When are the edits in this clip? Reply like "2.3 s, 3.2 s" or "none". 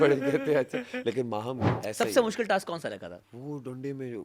1.8 s, 3.3 s